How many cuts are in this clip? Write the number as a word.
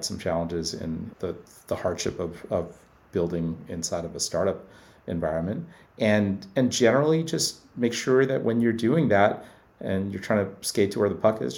one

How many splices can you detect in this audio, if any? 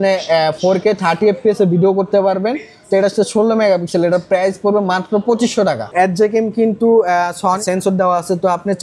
one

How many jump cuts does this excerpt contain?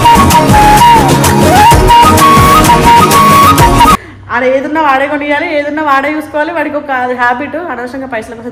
one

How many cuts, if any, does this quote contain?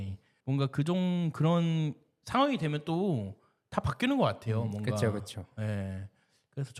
zero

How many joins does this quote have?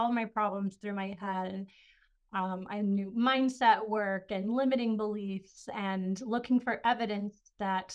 zero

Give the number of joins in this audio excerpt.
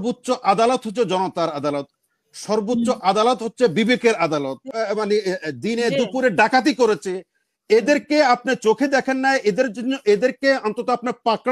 one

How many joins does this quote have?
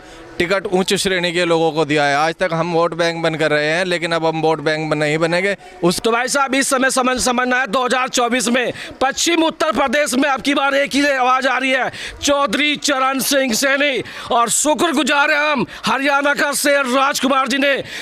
one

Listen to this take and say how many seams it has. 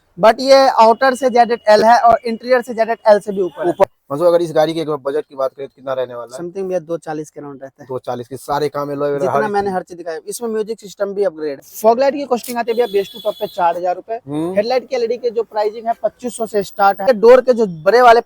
three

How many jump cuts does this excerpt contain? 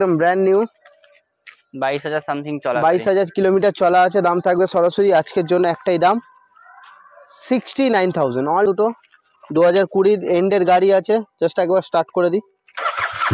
one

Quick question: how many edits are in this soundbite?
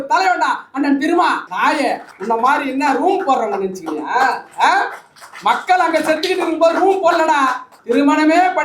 two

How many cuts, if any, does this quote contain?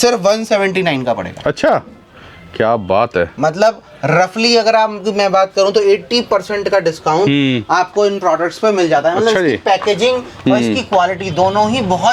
zero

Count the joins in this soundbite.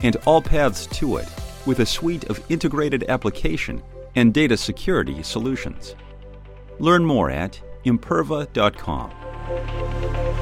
one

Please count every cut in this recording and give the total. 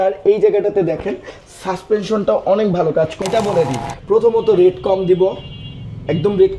one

